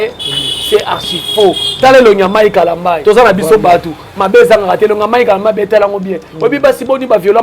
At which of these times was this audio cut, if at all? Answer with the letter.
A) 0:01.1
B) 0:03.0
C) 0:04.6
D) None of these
B